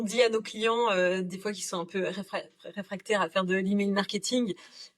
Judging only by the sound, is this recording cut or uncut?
uncut